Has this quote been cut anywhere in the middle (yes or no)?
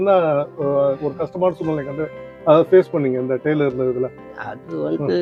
no